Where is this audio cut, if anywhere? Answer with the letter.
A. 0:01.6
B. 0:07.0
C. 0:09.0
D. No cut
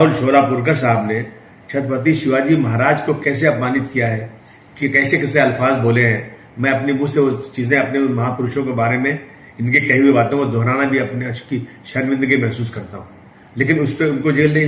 D